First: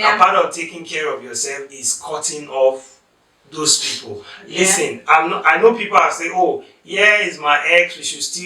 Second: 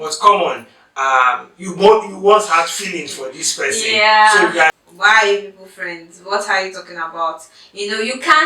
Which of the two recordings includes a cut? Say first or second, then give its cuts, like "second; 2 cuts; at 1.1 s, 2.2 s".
second; 1 cut; at 4.8 s